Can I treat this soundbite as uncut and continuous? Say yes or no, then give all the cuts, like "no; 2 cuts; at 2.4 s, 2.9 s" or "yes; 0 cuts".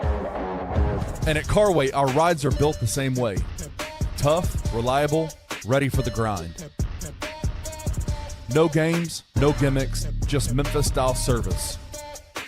no; 1 cut; at 0.9 s